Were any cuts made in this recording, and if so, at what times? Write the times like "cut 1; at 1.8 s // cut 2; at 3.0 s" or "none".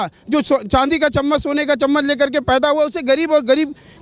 none